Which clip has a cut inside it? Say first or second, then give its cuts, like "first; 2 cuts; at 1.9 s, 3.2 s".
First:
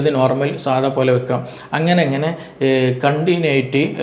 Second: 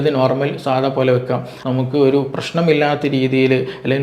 second; 1 cut; at 1.5 s